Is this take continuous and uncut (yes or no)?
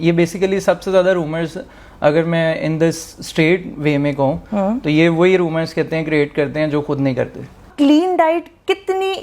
no